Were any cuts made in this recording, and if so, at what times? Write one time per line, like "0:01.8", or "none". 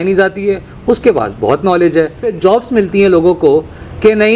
0:02.3